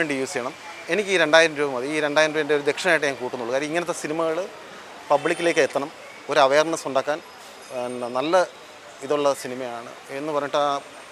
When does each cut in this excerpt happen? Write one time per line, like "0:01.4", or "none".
none